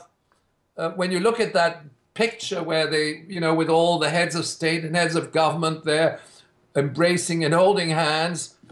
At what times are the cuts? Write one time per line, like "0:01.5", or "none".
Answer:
none